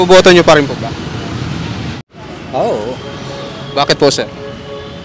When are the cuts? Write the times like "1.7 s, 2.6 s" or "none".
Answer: 2.0 s